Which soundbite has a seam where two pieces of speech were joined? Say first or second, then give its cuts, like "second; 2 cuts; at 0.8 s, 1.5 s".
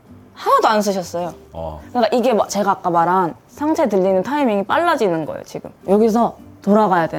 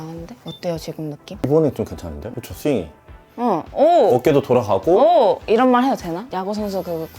second; 2 cuts; at 1.2 s, 5.4 s